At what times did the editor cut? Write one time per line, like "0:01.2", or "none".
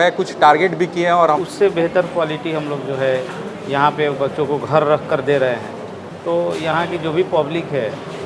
0:01.4